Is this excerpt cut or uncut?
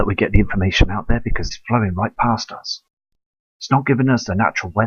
uncut